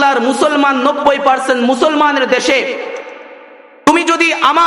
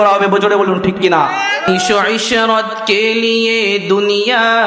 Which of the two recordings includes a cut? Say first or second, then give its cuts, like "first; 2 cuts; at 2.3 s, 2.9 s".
second; 1 cut; at 1.7 s